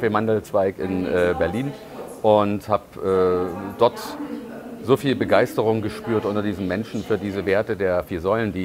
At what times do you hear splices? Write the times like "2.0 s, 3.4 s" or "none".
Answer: none